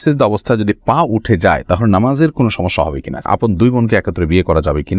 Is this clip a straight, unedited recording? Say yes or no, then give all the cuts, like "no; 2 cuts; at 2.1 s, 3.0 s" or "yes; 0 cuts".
no; 1 cut; at 3.2 s